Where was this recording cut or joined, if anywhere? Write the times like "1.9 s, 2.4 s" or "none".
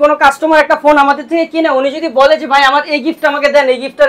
none